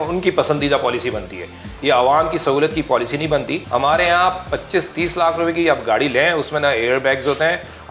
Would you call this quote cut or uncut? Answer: cut